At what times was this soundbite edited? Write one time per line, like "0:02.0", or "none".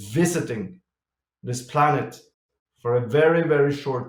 none